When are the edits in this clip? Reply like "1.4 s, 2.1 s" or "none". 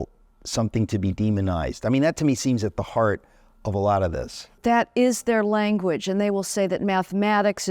4.5 s